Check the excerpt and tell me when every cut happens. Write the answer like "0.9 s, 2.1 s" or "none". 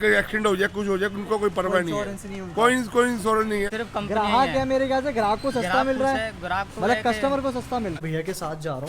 3.7 s, 8.0 s

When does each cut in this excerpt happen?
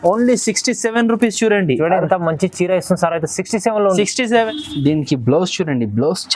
4.4 s

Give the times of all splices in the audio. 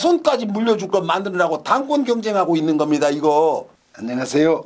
3.8 s

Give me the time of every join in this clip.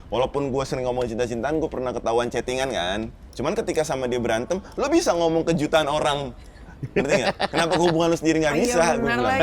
3.2 s

